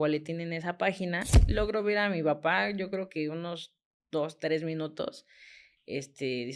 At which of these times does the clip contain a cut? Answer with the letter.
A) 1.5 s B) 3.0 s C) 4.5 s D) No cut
A